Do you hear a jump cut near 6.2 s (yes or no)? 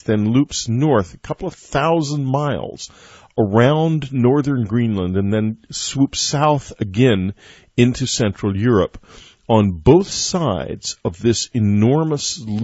yes